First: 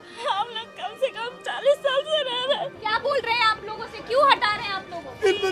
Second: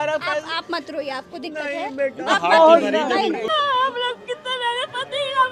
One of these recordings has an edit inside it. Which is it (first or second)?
second